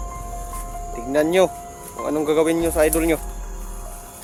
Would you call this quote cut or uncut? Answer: uncut